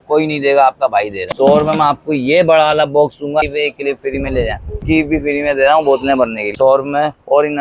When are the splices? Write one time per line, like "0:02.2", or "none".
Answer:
0:01.2
0:03.5
0:04.8
0:06.5